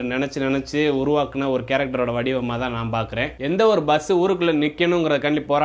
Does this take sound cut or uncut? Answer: cut